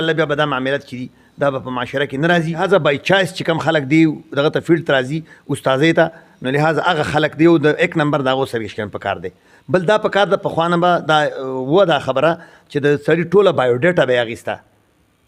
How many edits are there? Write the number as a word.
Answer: zero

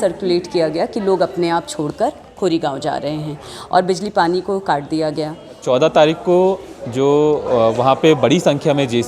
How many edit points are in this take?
one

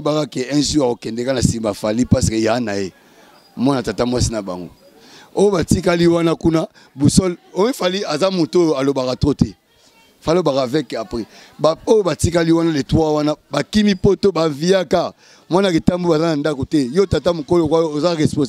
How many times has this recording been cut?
zero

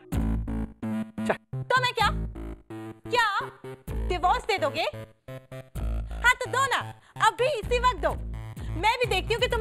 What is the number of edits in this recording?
zero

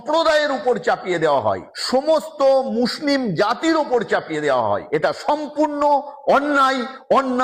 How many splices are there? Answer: two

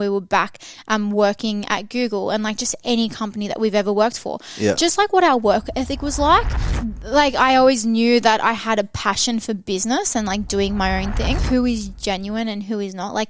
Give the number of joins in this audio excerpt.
two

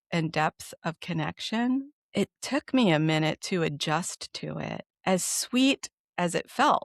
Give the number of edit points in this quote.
two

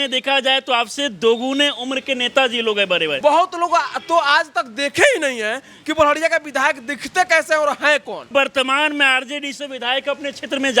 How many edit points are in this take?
two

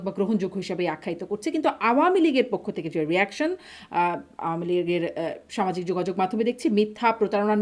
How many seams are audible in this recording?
zero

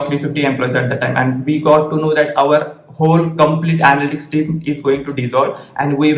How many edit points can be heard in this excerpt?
zero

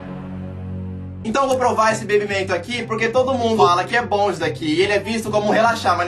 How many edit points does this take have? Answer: one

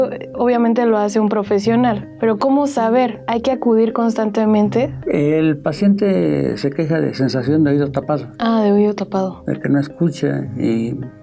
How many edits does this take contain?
one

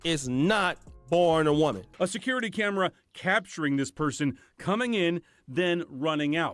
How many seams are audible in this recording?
one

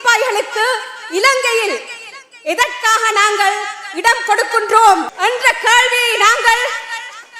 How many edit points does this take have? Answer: one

